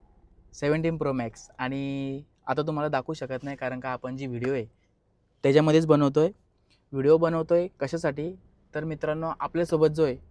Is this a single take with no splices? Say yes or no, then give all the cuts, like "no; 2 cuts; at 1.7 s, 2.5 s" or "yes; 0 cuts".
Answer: yes; 0 cuts